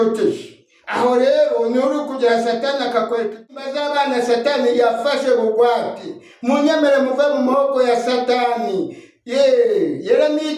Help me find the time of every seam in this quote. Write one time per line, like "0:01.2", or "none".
0:03.6